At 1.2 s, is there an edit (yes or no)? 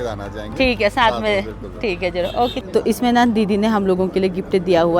no